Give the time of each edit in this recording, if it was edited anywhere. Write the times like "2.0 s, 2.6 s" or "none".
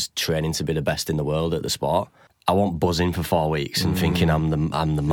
2.2 s

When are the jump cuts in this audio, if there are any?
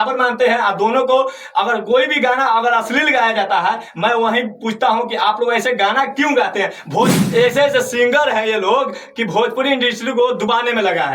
7.1 s

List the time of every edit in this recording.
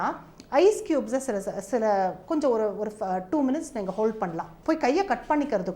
4.5 s

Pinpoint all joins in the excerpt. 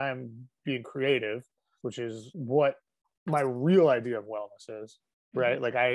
none

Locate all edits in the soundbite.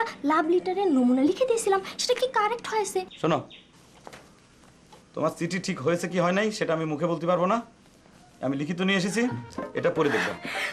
3.1 s

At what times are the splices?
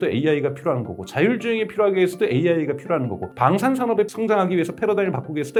none

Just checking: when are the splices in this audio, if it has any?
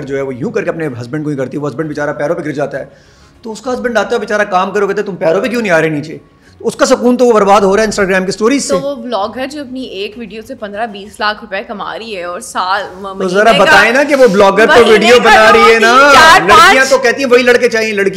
none

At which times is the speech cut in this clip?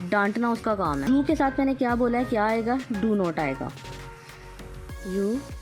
1.0 s

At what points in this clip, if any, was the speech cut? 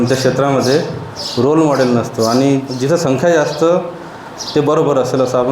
2.7 s

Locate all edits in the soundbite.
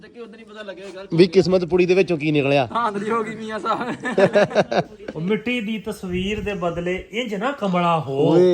5.0 s

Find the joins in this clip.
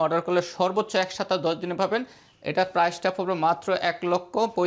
none

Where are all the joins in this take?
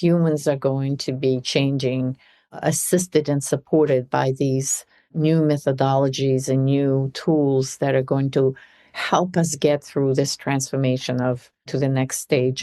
5.1 s, 11.7 s

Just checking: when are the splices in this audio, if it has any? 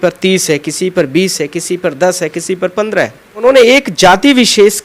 3.4 s

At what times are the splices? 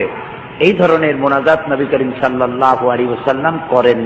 none

